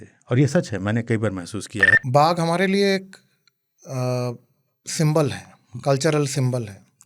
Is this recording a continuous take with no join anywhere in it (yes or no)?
no